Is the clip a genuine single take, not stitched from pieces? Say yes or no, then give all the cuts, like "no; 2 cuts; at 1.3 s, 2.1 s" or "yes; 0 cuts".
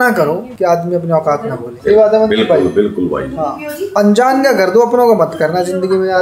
yes; 0 cuts